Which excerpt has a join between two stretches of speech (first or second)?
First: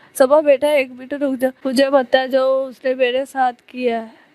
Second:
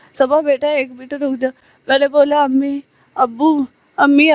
first